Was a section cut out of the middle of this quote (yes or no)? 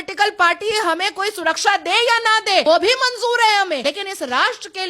yes